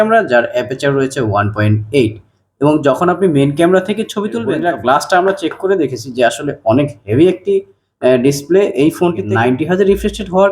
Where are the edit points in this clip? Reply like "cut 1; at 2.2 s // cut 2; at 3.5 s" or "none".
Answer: cut 1; at 4.6 s // cut 2; at 9.2 s

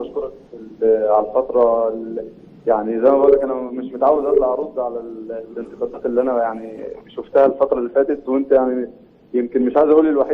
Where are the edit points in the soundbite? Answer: cut 1; at 8.1 s

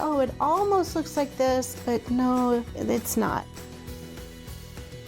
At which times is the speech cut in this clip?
cut 1; at 2.7 s // cut 2; at 3.5 s

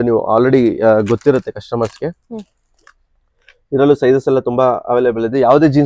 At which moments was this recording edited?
none

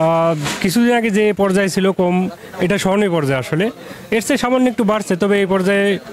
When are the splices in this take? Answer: none

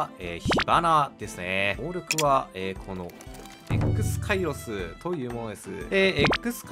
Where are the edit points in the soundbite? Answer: cut 1; at 1.8 s

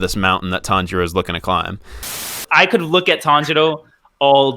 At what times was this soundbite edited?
cut 1; at 2.3 s

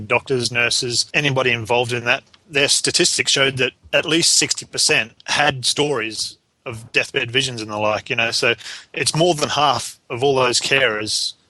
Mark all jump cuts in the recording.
cut 1; at 1.1 s // cut 2; at 2.4 s // cut 3; at 3.8 s // cut 4; at 5.2 s

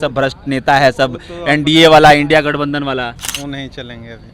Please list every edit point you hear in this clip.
cut 1; at 3.2 s

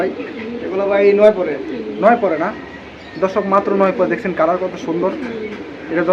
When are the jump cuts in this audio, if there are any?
none

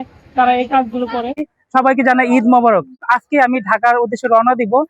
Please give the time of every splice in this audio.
cut 1; at 1.6 s // cut 2; at 3.0 s

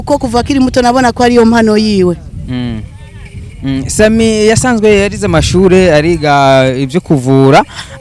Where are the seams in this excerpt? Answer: none

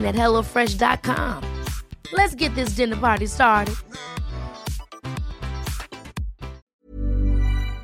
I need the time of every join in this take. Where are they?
cut 1; at 6.8 s

